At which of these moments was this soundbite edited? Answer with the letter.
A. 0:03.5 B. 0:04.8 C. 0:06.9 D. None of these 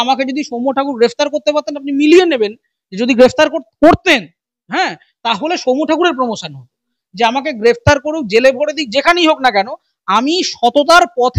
C